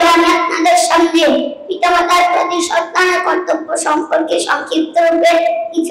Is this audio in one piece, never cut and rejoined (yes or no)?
yes